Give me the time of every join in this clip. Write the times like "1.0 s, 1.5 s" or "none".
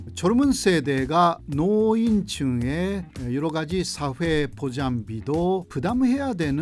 1.4 s